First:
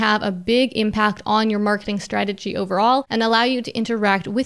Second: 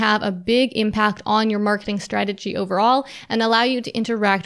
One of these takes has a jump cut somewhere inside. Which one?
first; 1 cut; at 3.1 s

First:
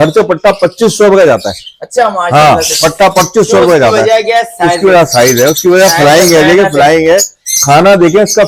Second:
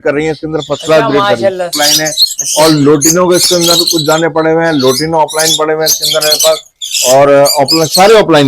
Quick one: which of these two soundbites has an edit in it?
second; 1 cut; at 1.8 s

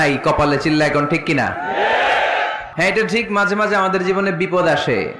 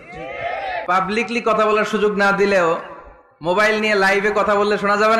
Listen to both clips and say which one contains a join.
first; 1 cut; at 2.7 s

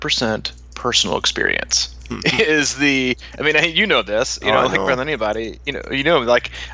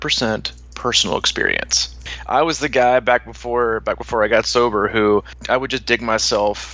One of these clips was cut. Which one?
second; 2 cuts; at 2.1 s, 5.3 s

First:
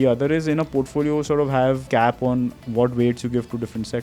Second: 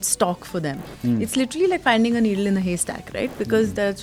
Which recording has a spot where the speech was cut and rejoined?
first; 1 cut; at 1.9 s

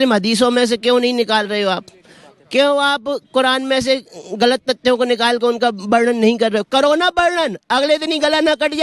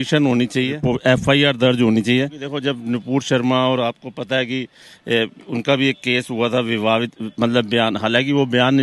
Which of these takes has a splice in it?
second; 2 cuts; at 0.9 s, 2.5 s

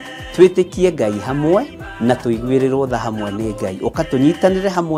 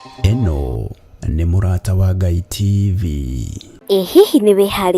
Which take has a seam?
second; 1 cut; at 3.6 s

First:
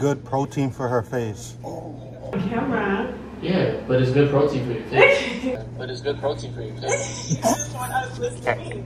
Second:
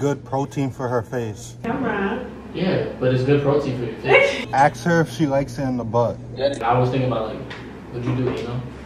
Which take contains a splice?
second; 3 cuts; at 1.6 s, 4.4 s, 6.6 s

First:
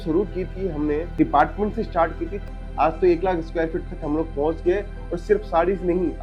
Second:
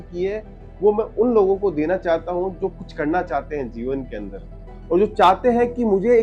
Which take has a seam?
first; 2 cuts; at 1.1 s, 2.4 s

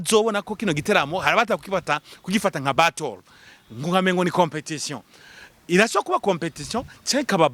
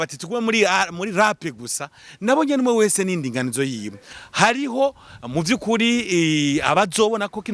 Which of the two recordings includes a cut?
second; 1 cut; at 4.1 s

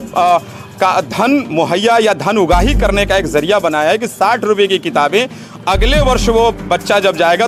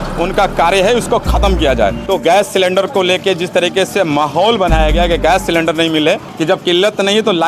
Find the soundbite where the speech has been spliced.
second; 2 cuts; at 2.0 s, 6.3 s

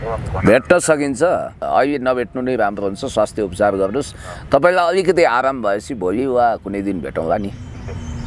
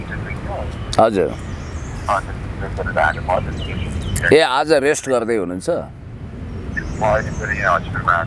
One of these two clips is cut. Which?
first; 1 cut; at 1.6 s

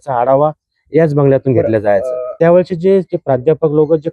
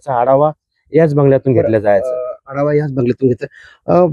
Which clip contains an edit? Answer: first; 1 cut; at 2.2 s

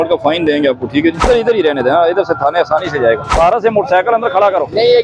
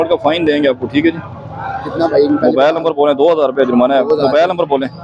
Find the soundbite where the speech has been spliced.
first; 2 cuts; at 1.3 s, 3.3 s

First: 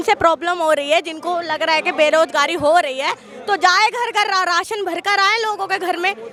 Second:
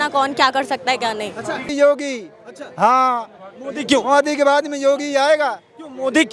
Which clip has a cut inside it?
second; 1 cut; at 1.7 s

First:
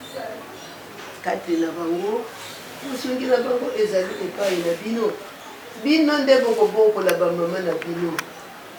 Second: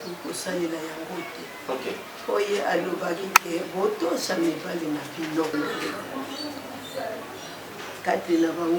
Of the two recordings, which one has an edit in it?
second; 1 cut; at 5.5 s

